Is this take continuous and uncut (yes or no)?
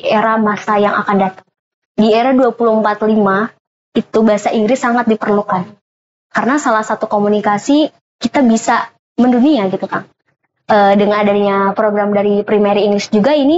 yes